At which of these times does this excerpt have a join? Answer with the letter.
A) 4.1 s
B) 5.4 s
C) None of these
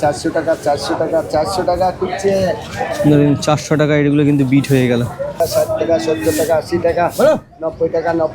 B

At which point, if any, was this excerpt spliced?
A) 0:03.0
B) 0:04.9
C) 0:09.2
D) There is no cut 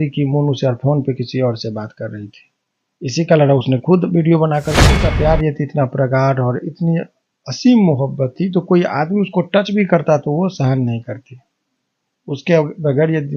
B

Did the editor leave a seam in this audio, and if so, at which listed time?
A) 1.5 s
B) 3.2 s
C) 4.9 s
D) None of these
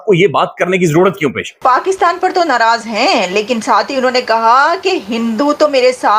A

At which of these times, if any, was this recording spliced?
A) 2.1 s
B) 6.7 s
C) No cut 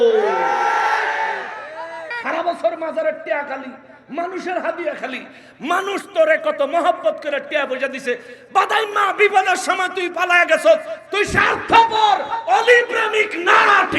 A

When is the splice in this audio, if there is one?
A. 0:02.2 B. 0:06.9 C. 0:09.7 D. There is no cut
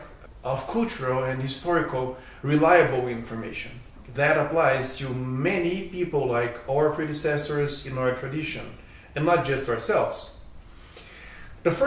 D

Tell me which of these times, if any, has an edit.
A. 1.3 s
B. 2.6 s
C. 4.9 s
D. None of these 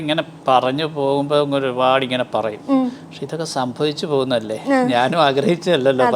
D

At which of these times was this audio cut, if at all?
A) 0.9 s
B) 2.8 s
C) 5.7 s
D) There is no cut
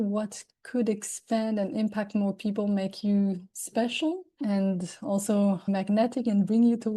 C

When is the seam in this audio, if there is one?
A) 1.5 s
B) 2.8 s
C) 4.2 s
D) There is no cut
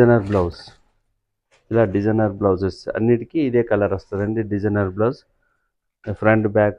D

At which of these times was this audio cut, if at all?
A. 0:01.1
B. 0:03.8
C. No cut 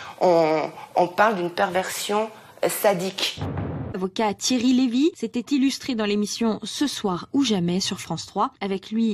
B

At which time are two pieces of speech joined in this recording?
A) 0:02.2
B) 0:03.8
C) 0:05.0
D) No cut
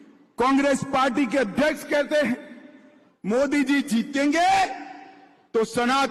D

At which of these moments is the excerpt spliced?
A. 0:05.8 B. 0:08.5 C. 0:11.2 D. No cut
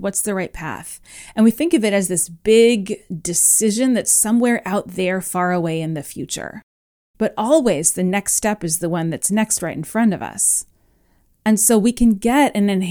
D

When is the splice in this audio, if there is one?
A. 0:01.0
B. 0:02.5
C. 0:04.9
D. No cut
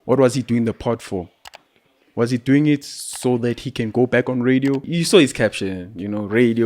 C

